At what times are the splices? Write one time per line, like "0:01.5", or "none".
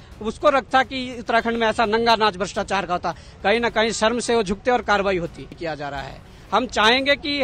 0:05.6